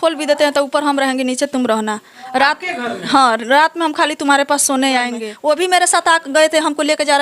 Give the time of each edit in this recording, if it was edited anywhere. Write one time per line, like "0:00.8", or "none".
0:05.2

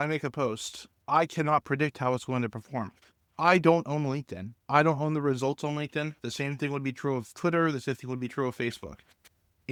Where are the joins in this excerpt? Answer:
none

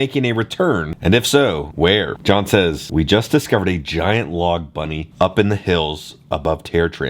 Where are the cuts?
none

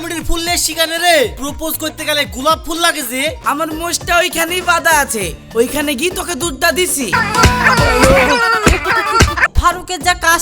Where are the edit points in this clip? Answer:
0:03.4
0:07.1
0:09.4

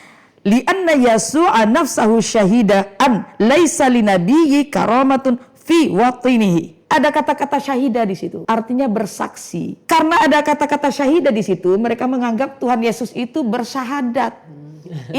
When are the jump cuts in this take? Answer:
0:06.8
0:08.3
0:09.8

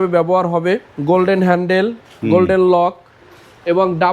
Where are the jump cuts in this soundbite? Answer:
0:00.9

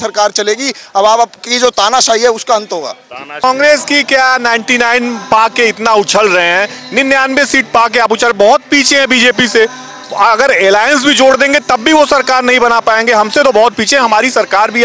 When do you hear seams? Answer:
0:03.4

